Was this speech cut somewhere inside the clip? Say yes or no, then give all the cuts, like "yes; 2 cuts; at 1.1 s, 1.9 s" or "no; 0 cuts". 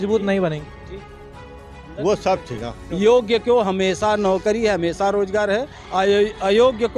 yes; 1 cut; at 2.8 s